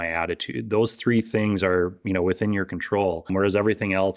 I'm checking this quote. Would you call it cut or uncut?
cut